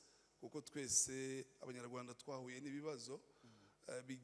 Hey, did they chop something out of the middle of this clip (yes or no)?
no